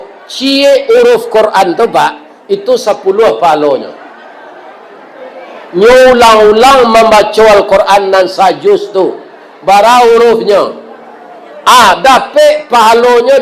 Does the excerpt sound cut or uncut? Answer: uncut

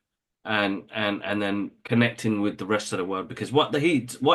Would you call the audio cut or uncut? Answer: uncut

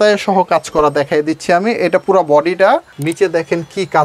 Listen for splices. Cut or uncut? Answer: cut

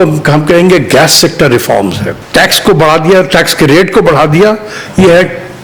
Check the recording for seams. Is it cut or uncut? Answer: cut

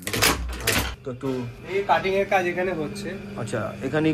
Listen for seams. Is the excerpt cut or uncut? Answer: cut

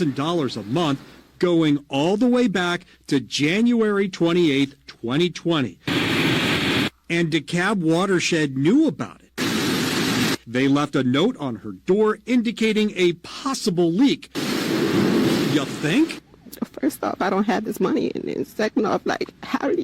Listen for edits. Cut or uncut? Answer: cut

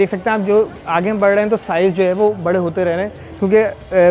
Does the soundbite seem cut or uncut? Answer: uncut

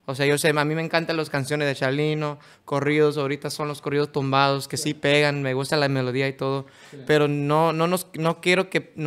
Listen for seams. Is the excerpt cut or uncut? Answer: uncut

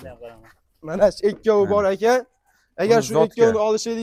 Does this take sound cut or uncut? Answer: uncut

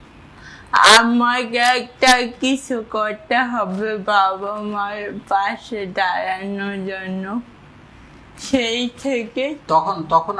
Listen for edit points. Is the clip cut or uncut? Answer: uncut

